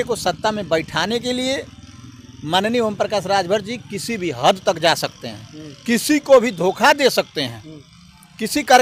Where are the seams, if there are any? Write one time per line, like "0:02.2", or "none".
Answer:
none